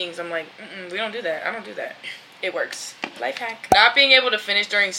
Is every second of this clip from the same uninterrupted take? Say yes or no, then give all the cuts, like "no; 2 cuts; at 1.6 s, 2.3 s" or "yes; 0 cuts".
yes; 0 cuts